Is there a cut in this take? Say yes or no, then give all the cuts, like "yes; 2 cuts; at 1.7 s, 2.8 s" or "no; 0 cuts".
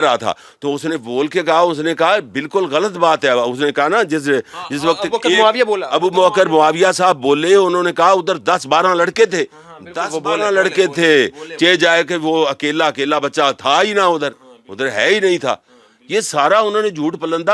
no; 0 cuts